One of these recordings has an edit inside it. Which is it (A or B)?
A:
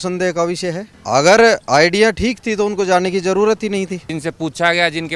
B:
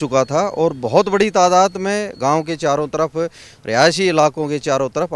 A